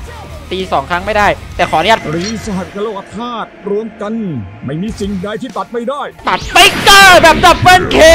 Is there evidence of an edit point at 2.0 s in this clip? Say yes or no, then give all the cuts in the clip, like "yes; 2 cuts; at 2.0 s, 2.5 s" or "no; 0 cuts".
yes; 1 cut; at 2.0 s